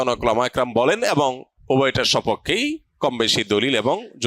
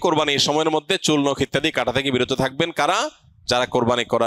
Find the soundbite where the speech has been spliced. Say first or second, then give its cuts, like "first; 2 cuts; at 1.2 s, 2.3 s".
first; 1 cut; at 1.5 s